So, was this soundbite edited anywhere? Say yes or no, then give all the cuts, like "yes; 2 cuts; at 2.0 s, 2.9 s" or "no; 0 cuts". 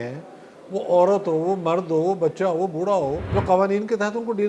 yes; 1 cut; at 3.2 s